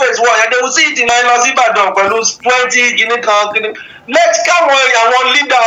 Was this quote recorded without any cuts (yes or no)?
no